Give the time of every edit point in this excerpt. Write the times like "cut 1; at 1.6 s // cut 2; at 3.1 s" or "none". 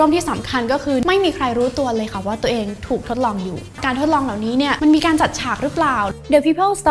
cut 1; at 1.0 s // cut 2; at 3.8 s // cut 3; at 4.8 s // cut 4; at 6.1 s